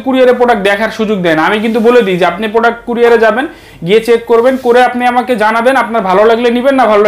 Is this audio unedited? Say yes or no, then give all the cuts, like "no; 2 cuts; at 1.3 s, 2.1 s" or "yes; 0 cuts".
yes; 0 cuts